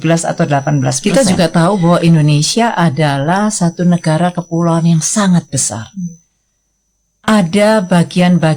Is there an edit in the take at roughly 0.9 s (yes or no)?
yes